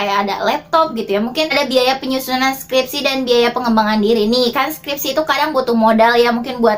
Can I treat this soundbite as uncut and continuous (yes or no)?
no